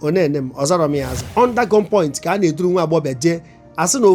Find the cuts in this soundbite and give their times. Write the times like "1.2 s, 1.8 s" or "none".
1.3 s